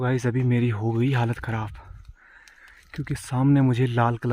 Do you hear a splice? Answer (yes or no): no